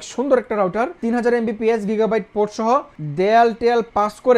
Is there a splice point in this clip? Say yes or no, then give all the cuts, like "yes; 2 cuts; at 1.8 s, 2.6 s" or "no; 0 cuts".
yes; 2 cuts; at 0.9 s, 3.0 s